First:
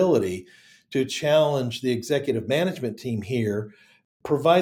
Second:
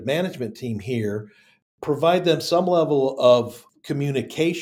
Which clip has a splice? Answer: second; 1 cut; at 3.6 s

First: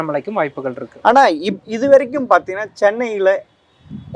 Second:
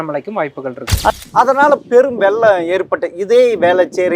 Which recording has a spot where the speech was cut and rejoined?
second; 1 cut; at 1.1 s

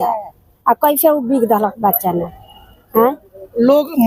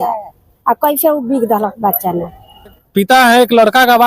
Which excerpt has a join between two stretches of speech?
second; 1 cut; at 2.8 s

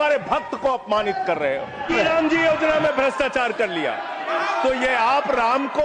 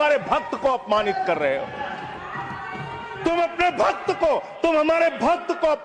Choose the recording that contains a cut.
first; 1 cut; at 1.9 s

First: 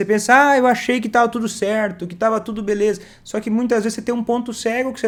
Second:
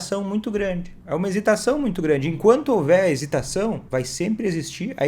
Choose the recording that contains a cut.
second; 2 cuts; at 0.9 s, 3.8 s

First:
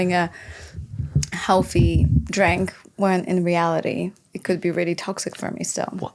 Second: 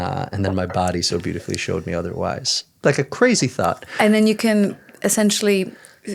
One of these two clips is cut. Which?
second; 1 cut; at 2.6 s

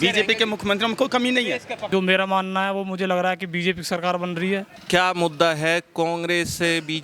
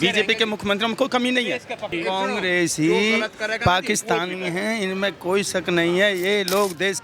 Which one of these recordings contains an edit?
second; 1 cut; at 1.8 s

